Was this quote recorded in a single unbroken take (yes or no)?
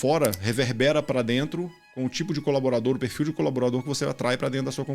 yes